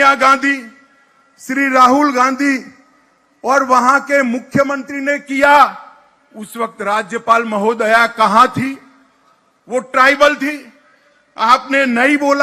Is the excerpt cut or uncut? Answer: uncut